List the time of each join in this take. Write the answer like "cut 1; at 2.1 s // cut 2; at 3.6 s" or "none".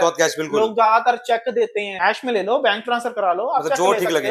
cut 1; at 2.0 s